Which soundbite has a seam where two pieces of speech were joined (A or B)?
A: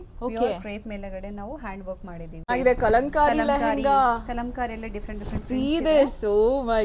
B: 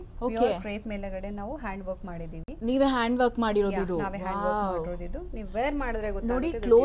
A